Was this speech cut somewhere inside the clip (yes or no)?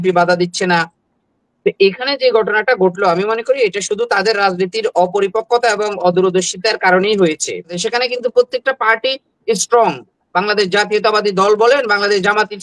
yes